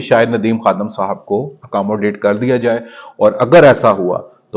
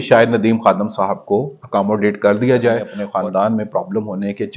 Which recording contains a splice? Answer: second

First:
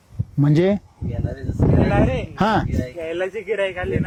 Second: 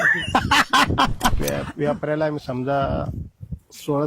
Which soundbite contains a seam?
second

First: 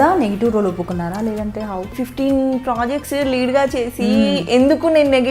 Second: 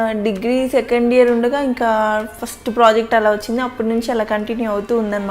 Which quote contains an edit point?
first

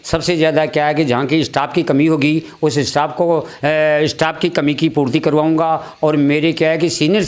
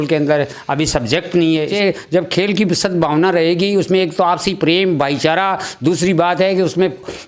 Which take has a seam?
second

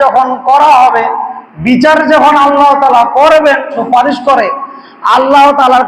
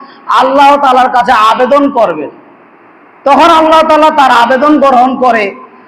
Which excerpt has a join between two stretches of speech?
first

